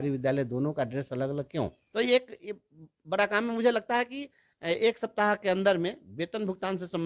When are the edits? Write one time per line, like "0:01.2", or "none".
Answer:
0:01.8

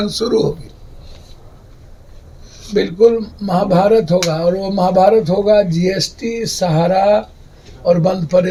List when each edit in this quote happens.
none

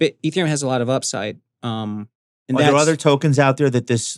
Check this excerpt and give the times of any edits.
none

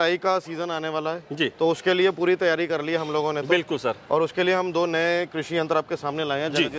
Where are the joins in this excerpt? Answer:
none

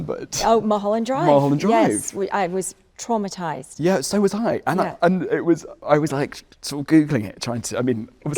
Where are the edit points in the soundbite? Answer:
0:05.8

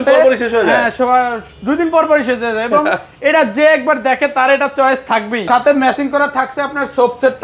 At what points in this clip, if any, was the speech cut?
0:05.5

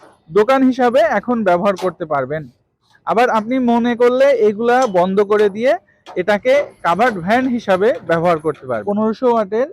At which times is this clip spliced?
0:08.8

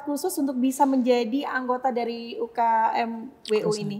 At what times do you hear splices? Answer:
none

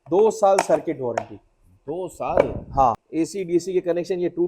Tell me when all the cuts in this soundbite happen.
0:03.0

